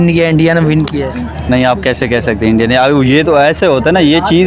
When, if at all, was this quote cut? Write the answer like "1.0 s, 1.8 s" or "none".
none